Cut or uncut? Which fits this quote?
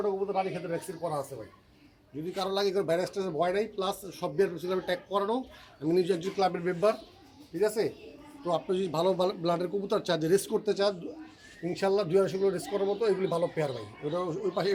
uncut